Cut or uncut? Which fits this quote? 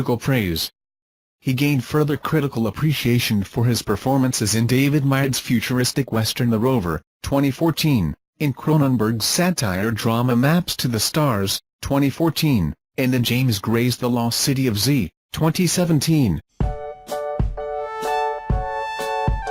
uncut